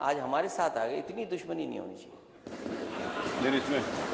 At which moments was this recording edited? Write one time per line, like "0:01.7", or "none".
none